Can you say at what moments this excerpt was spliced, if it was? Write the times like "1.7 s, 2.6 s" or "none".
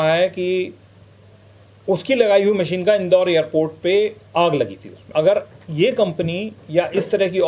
5.0 s